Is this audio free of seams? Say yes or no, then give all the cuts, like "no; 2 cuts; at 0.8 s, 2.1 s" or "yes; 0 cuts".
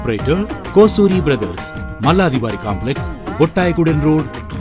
yes; 0 cuts